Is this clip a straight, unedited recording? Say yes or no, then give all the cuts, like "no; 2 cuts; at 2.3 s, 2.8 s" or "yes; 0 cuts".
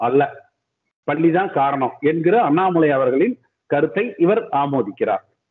yes; 0 cuts